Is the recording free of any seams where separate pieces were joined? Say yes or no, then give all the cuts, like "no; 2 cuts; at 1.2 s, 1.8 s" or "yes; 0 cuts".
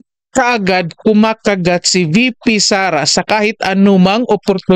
yes; 0 cuts